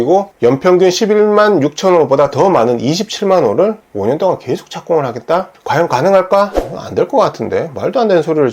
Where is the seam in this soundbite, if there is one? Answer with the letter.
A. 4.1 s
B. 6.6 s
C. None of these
B